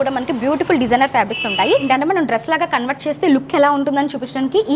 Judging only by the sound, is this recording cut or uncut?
cut